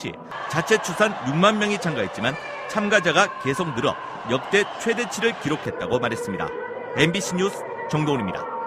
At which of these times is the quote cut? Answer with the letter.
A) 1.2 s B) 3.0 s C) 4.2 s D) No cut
C